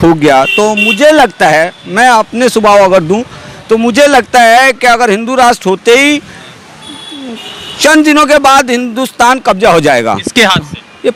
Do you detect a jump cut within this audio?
no; 0 cuts

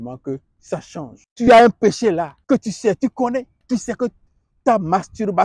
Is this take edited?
yes; 3 cuts; at 1.2 s, 2.3 s, 3.5 s

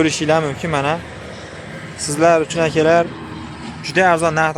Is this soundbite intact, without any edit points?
yes; 0 cuts

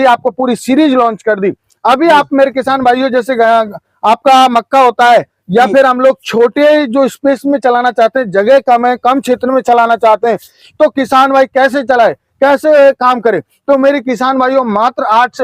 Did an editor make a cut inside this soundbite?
no; 0 cuts

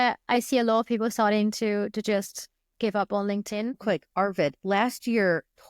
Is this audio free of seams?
no; 1 cut; at 3.8 s

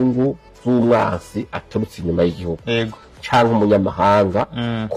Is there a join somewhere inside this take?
no; 0 cuts

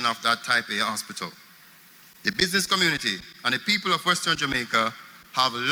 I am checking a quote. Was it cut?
no; 0 cuts

